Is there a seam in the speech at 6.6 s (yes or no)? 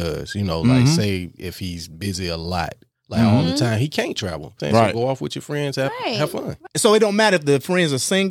yes